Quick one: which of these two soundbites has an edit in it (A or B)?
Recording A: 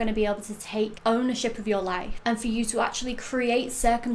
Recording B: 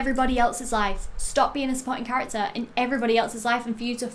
A